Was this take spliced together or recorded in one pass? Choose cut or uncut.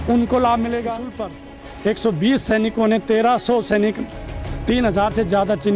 cut